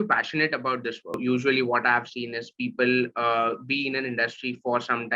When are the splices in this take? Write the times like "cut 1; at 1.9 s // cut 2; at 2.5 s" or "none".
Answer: cut 1; at 1.2 s